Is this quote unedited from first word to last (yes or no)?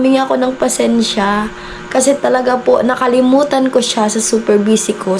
yes